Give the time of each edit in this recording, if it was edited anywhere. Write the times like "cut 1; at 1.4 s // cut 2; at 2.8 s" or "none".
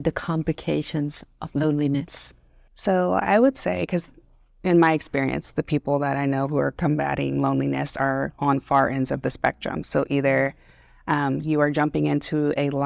none